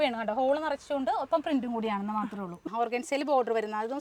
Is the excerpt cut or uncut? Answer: cut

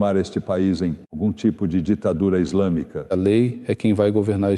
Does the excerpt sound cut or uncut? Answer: cut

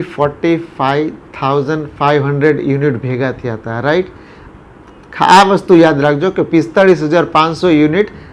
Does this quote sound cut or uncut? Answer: uncut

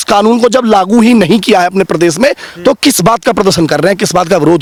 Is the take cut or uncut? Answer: uncut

